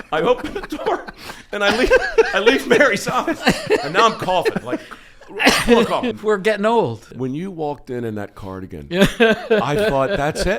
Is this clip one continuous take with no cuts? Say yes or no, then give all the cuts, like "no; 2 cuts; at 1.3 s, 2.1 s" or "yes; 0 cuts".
no; 2 cuts; at 6.2 s, 7.1 s